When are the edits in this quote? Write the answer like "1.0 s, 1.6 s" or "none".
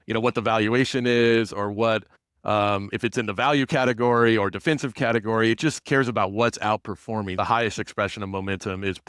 7.4 s